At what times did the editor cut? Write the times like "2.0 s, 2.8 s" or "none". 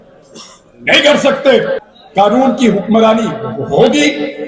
1.8 s